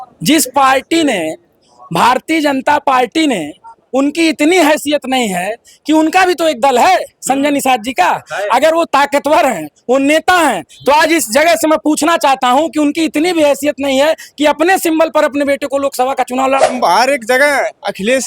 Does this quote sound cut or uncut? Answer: cut